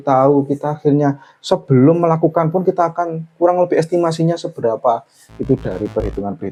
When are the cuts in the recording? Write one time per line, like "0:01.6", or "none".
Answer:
none